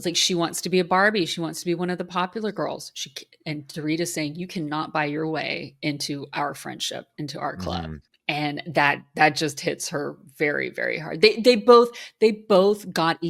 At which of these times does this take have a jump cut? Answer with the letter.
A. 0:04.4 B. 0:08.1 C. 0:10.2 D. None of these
B